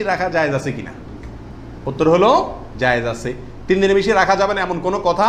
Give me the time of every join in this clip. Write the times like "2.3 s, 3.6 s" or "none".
none